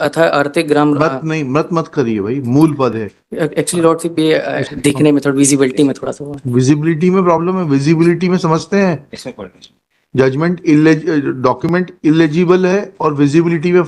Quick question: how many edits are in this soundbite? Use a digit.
1